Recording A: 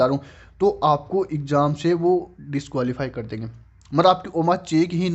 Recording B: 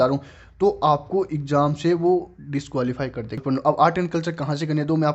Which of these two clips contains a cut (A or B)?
B